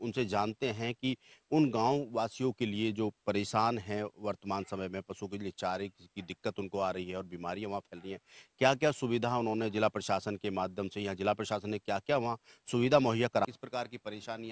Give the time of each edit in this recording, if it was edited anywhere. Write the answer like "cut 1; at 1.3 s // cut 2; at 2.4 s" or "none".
cut 1; at 13.4 s